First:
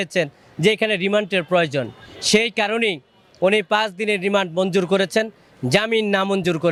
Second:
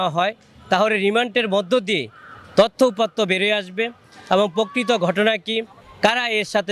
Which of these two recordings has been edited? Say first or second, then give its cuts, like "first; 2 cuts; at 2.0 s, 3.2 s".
second; 1 cut; at 5.8 s